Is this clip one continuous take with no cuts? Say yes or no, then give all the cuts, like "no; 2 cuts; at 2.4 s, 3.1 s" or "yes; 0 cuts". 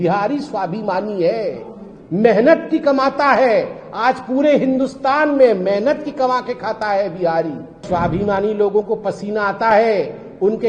no; 1 cut; at 7.9 s